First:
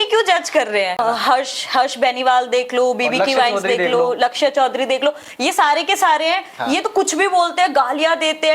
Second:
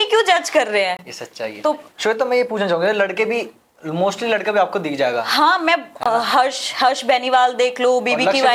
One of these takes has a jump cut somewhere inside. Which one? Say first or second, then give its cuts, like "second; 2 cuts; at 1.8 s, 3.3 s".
first; 1 cut; at 0.9 s